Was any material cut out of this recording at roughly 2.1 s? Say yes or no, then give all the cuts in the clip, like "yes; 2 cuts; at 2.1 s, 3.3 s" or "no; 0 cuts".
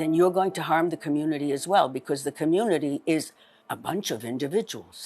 no; 1 cut; at 3.7 s